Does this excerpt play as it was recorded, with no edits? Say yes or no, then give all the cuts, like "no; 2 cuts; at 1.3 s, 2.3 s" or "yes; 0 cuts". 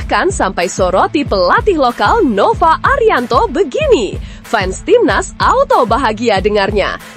yes; 0 cuts